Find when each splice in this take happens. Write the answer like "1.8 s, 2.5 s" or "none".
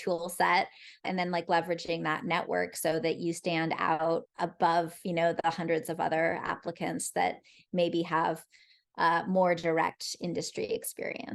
1.0 s, 4.3 s